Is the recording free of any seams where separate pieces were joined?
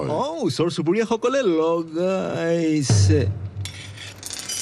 yes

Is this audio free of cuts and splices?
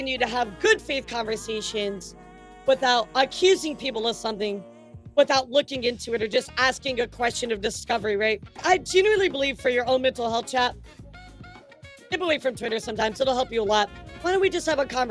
no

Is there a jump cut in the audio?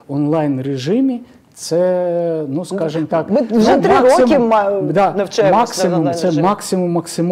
no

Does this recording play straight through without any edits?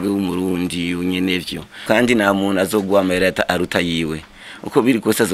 no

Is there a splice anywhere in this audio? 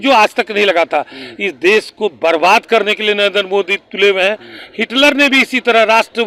no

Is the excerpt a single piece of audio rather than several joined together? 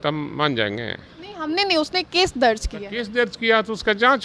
yes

